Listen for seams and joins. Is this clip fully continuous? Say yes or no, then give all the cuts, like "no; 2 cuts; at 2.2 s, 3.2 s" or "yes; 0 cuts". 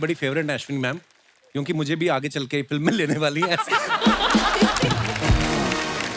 yes; 0 cuts